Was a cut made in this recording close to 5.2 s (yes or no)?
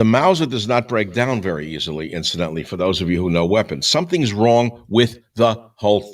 no